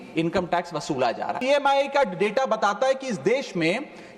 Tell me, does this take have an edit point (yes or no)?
yes